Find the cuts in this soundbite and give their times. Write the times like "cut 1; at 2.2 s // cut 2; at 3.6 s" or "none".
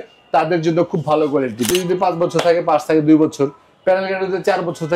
cut 1; at 1.7 s